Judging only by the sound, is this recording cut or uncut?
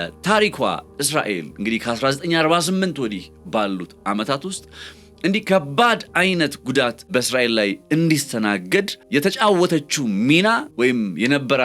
cut